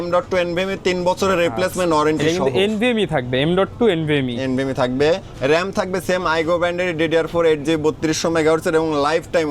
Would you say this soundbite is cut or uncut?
uncut